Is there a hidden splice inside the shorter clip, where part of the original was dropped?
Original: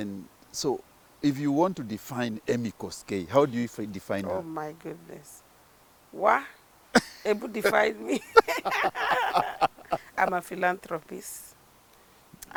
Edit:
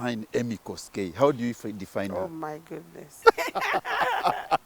yes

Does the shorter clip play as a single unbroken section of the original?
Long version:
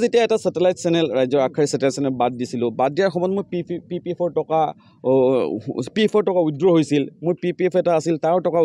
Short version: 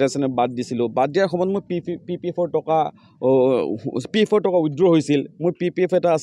yes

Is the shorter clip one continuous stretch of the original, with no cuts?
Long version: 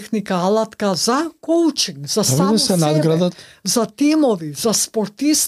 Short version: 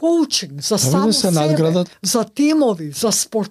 no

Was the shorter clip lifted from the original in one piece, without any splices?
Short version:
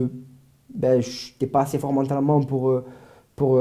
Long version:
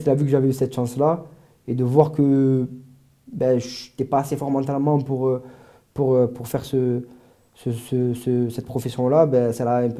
yes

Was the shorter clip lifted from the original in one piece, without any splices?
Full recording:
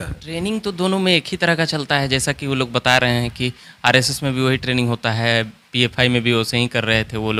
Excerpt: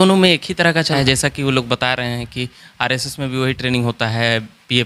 no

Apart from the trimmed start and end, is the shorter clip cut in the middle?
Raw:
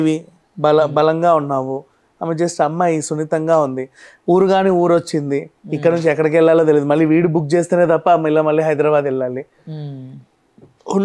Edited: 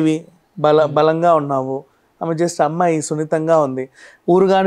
no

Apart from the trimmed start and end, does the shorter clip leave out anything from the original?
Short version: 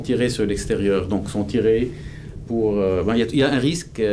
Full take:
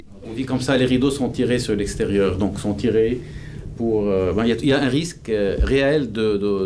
no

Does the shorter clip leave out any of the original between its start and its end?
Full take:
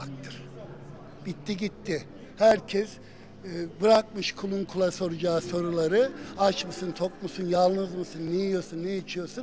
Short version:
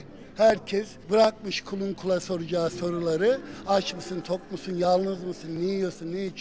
yes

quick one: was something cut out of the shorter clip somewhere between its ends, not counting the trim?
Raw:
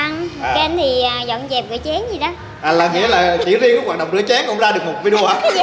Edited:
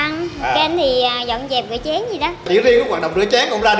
yes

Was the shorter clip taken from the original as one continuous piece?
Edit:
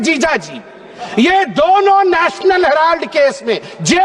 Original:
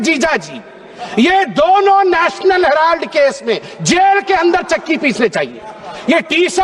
yes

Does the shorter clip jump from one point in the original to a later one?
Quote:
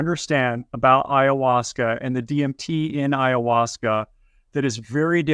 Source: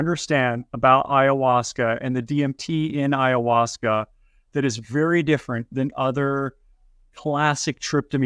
no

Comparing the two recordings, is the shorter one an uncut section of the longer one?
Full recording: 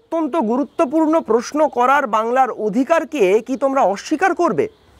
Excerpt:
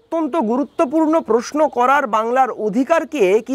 yes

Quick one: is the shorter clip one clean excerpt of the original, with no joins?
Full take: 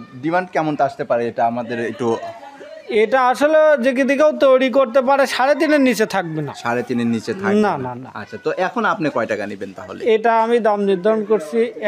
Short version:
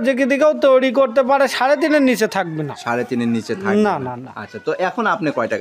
yes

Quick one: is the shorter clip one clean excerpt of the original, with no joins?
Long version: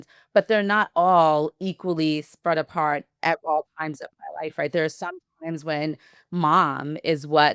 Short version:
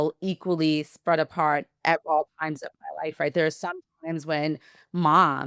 yes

